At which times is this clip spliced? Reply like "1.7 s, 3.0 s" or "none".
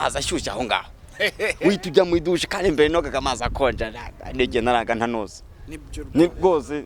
none